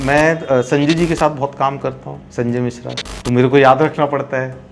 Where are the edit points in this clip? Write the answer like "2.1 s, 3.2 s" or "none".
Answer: 3.1 s